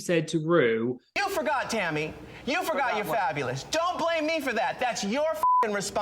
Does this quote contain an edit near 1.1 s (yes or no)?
yes